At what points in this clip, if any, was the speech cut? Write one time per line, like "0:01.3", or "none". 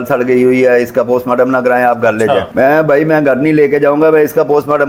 none